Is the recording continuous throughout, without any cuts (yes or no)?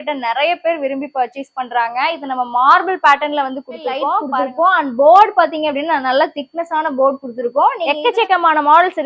no